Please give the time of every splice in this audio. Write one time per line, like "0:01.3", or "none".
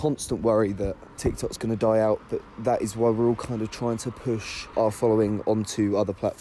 0:01.1
0:04.6

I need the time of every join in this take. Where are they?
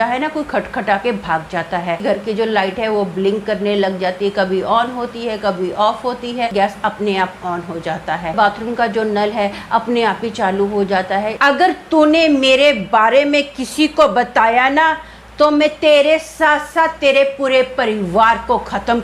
0:02.0
0:06.5
0:08.3
0:11.4

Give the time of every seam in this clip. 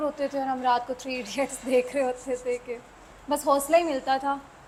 none

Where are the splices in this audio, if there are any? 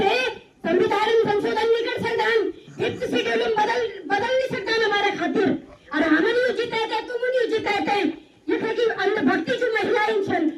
none

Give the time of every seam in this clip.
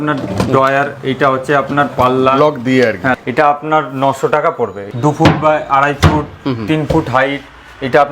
0:03.1
0:04.8

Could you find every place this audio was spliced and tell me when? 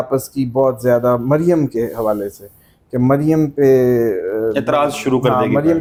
none

